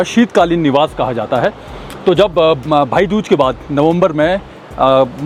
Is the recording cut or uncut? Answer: uncut